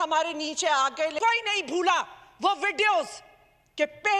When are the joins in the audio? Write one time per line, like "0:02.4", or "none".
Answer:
0:01.2